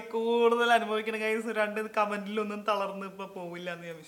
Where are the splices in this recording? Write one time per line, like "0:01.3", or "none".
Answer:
none